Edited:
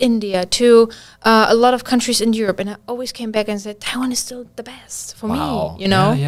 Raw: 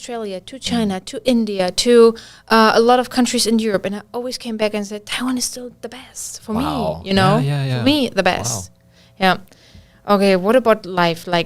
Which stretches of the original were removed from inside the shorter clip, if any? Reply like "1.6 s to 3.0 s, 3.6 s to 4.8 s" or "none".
none

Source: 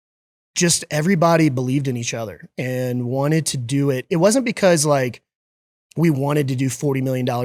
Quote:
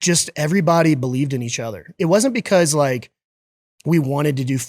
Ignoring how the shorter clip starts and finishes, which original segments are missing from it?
2.5 s to 4.0 s

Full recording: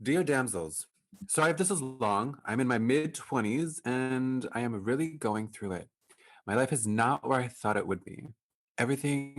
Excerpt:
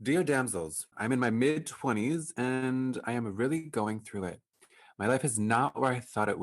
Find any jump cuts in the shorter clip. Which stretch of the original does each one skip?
0.9 s to 2.4 s

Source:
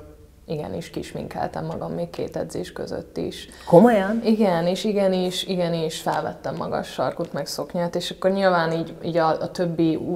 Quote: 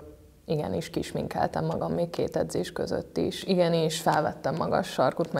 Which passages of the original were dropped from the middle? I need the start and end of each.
3.4 s to 5.4 s

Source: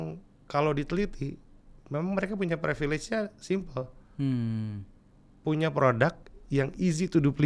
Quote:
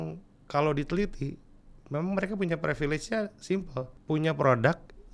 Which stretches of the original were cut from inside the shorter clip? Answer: 3.9 s to 5.3 s

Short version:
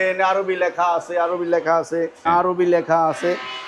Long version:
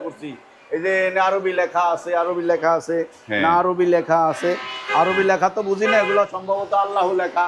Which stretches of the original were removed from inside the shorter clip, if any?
3.2 s to 3.4 s

